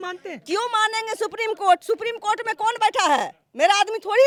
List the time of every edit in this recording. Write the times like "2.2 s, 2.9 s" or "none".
none